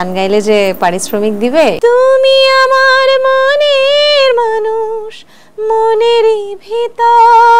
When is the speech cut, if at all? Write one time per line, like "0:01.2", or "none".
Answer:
0:01.8